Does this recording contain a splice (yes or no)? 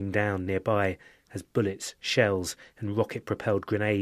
yes